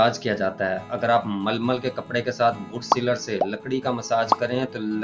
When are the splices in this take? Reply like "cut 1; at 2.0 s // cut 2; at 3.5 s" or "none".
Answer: none